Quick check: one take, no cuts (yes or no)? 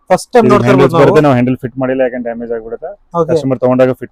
yes